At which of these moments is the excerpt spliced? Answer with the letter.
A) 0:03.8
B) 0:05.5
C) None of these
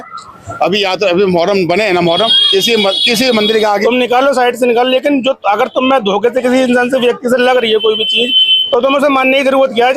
A